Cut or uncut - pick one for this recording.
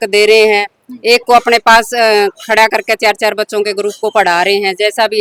uncut